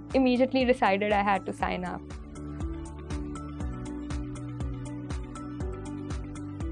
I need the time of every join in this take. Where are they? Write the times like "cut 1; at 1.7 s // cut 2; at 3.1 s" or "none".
cut 1; at 2.1 s // cut 2; at 5.0 s